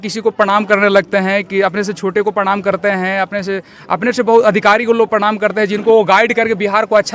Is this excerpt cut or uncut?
uncut